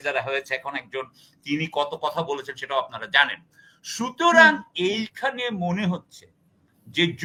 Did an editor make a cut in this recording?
no; 0 cuts

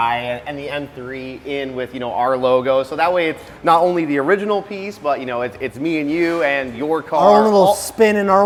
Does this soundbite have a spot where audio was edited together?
no; 0 cuts

